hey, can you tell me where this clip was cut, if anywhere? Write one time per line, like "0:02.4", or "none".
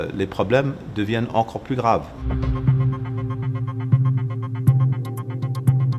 0:02.2
0:05.3